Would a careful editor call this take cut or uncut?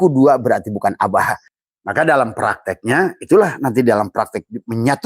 cut